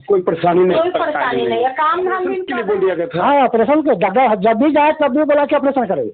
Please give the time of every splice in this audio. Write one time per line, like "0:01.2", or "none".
0:02.5